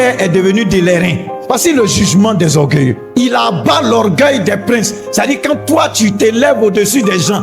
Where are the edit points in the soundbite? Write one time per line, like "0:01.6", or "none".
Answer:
0:01.3
0:03.0